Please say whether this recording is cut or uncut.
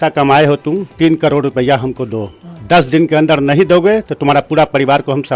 uncut